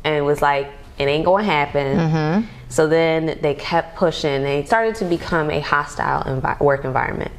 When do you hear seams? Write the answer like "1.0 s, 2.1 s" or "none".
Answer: 4.7 s